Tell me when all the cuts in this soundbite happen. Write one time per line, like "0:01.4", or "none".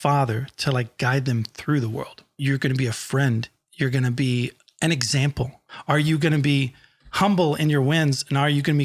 0:02.4